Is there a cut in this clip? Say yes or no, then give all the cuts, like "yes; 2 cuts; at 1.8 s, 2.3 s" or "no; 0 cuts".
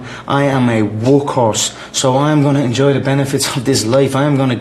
no; 0 cuts